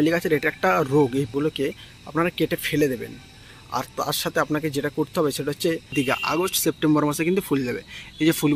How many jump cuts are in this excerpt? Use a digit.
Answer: 2